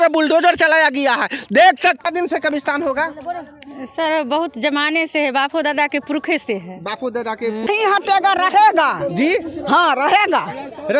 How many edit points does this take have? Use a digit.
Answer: 2